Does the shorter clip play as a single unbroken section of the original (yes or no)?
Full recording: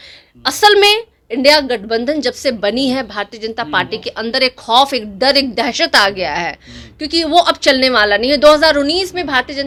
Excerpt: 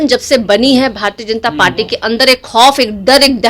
yes